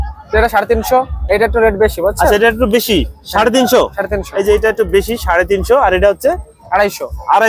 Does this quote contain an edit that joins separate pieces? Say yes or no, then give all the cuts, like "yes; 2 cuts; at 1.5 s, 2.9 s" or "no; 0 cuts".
no; 0 cuts